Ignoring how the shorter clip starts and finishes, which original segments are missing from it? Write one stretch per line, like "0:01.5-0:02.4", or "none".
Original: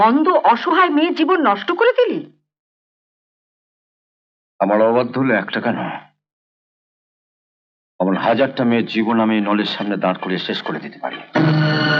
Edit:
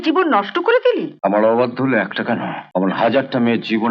0:02.2-0:04.5
0:05.9-0:07.8